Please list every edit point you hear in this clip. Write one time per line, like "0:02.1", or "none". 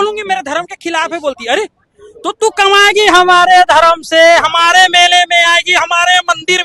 none